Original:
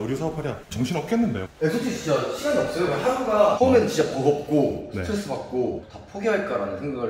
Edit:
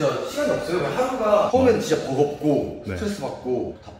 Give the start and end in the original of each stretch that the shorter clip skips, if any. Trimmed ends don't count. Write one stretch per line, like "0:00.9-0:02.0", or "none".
none